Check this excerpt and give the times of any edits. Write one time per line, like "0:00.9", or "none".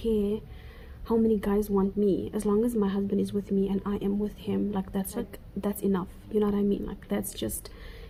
none